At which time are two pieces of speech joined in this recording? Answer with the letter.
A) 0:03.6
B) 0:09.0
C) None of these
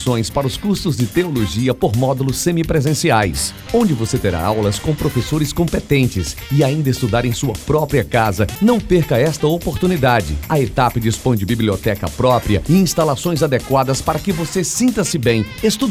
C